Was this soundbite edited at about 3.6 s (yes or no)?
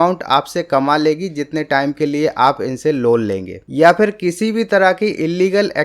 yes